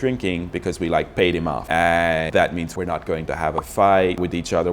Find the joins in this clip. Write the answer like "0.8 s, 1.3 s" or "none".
1.7 s, 2.7 s